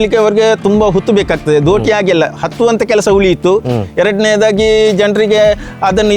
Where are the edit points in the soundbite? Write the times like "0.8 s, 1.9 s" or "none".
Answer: none